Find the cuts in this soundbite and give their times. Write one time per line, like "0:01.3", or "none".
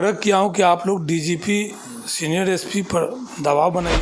none